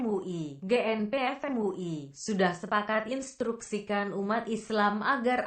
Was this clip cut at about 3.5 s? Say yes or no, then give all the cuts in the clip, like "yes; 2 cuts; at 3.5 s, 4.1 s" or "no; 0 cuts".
no; 1 cut; at 1.9 s